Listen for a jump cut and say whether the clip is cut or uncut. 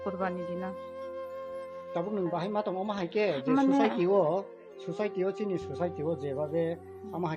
uncut